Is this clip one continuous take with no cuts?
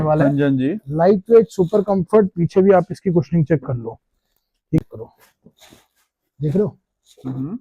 no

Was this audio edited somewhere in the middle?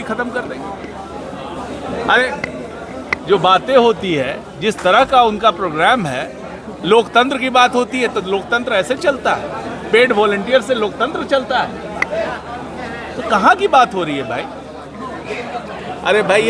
yes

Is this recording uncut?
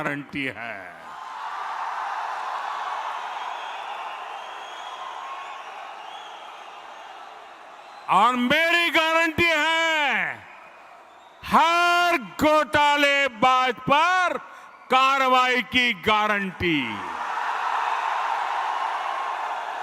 yes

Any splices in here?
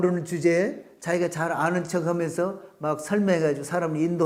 no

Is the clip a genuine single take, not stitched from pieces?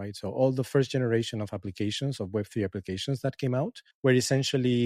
no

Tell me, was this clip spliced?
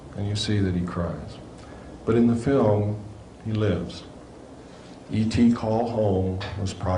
yes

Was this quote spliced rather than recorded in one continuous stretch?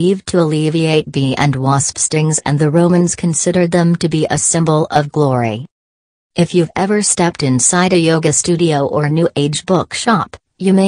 yes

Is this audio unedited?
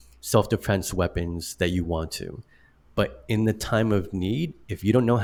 yes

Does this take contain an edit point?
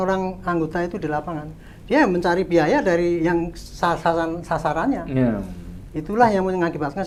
no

